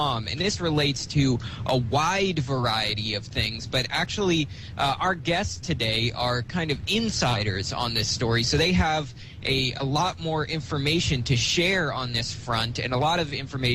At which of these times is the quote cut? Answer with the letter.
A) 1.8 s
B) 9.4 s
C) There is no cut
C